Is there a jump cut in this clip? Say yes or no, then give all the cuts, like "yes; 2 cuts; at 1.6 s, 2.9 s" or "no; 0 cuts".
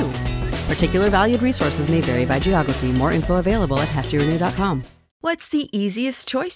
yes; 1 cut; at 5.1 s